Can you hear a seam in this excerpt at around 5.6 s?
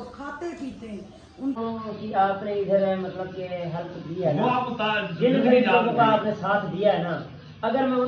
no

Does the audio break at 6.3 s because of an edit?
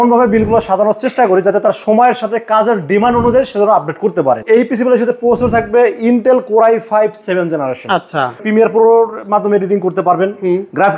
no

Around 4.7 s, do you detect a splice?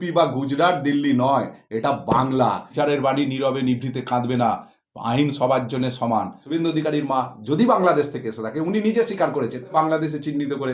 no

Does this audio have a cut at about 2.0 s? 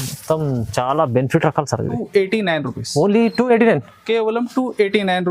yes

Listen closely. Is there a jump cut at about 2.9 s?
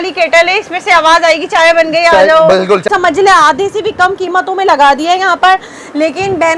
yes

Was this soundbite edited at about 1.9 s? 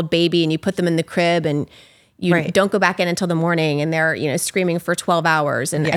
no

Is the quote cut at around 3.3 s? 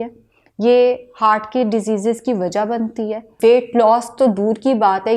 yes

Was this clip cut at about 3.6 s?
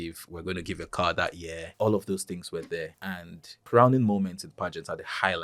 yes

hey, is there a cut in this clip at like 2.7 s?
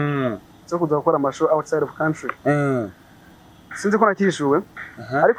no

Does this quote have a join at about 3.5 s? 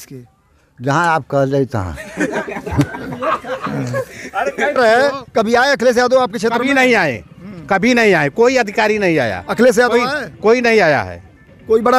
no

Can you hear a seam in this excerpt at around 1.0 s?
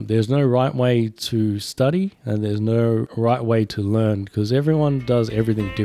no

